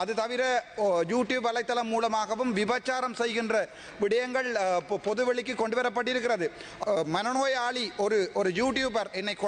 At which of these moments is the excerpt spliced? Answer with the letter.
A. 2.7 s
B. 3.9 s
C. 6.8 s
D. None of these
C